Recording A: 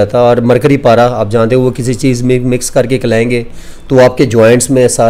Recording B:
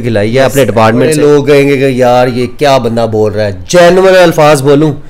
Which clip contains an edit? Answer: B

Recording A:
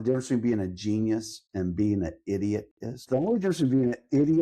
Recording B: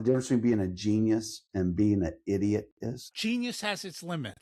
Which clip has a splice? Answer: A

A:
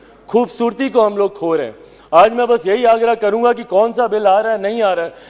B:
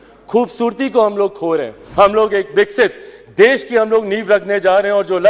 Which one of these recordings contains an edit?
B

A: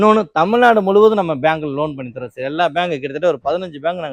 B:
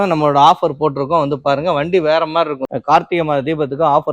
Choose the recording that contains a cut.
B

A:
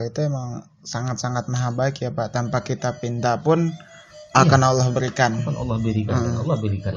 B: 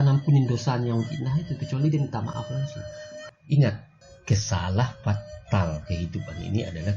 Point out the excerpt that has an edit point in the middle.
B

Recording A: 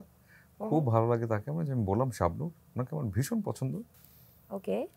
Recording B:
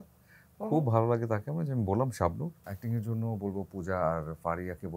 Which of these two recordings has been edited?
B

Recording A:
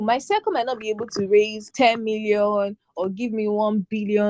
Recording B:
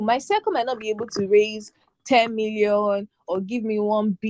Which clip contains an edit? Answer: A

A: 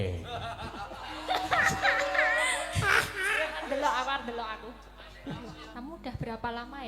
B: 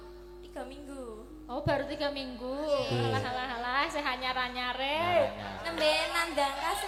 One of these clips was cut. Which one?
A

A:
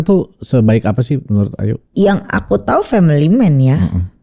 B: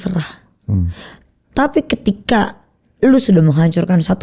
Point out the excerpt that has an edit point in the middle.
A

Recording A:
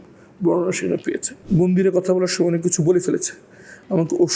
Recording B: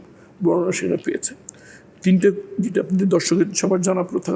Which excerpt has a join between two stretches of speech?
A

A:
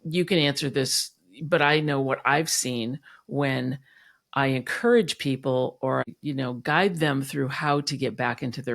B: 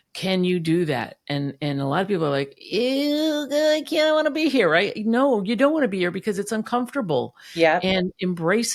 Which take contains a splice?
A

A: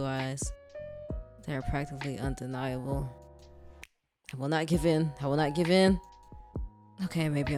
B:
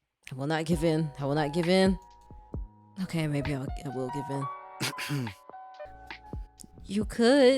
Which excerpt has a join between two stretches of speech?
B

